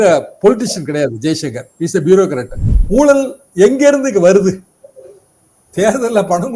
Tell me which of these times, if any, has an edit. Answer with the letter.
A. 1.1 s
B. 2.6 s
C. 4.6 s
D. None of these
B